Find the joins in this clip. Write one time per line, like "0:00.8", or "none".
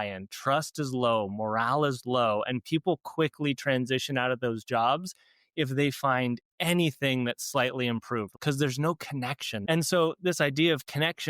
0:08.3
0:09.6